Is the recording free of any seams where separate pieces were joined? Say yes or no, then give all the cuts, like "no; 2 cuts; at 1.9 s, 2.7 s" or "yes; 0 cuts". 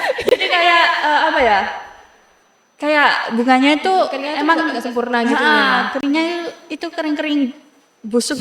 yes; 0 cuts